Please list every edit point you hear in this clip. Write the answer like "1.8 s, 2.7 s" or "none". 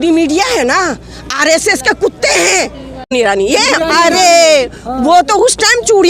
3.1 s